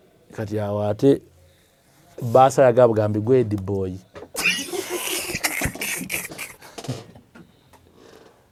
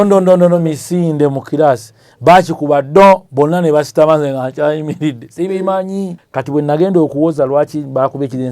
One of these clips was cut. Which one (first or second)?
second